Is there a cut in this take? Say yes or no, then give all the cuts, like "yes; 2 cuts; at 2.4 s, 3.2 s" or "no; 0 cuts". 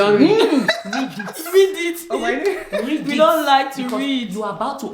no; 0 cuts